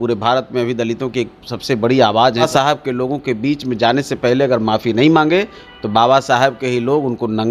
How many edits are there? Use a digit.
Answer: 1